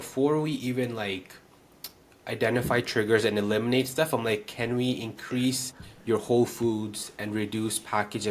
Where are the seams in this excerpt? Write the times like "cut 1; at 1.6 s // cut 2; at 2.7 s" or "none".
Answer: none